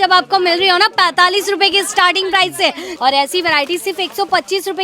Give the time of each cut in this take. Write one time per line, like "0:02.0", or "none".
0:02.9